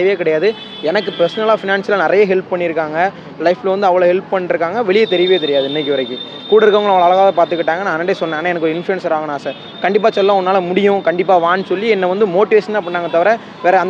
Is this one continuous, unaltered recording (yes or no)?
yes